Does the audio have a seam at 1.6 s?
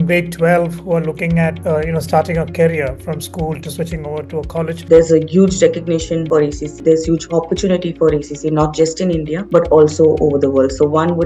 yes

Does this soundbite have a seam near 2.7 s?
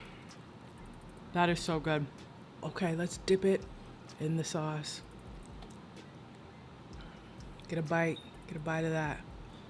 yes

